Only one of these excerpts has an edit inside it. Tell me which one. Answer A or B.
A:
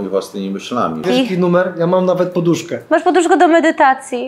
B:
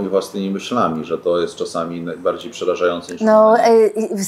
A